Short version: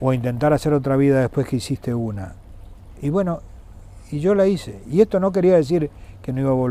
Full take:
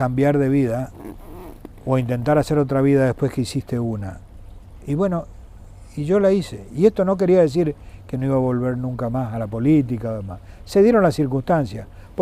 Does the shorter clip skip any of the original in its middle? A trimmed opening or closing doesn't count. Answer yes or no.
no